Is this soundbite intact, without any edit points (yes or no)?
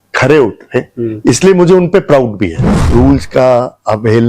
no